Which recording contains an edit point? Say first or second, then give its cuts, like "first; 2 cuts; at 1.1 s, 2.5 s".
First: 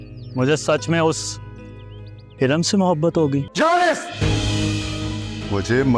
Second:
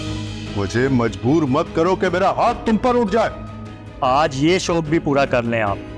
first; 1 cut; at 3.5 s